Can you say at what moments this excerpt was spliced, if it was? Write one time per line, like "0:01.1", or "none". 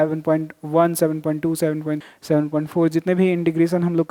0:02.0